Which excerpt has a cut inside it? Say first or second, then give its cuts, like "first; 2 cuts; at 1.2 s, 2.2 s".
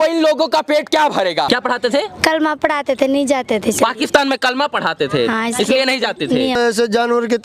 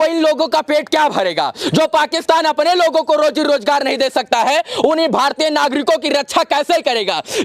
first; 2 cuts; at 1.5 s, 6.6 s